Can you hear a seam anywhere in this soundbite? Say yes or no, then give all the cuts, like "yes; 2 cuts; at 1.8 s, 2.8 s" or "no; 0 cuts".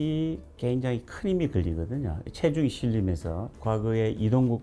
yes; 1 cut; at 3.5 s